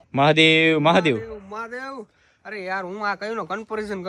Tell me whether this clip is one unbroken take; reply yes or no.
yes